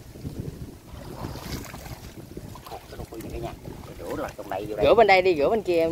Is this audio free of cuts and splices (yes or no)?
yes